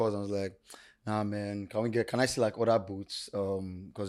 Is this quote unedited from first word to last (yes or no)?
yes